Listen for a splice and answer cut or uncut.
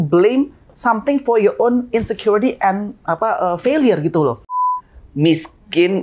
cut